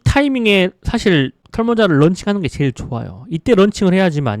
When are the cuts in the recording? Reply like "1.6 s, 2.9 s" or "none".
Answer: 1.4 s